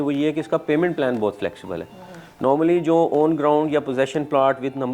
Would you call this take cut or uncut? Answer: uncut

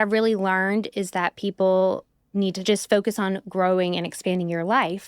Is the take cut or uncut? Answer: cut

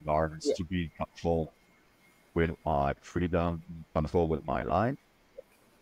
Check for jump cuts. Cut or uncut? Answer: uncut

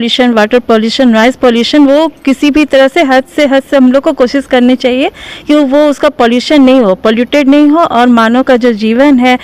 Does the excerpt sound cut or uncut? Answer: uncut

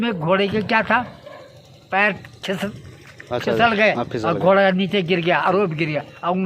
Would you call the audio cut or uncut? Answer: uncut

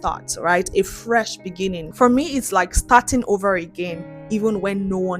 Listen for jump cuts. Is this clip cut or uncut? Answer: cut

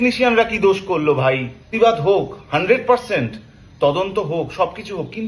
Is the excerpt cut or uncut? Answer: cut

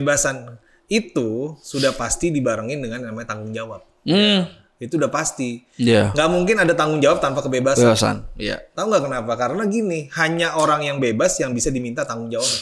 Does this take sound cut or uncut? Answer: uncut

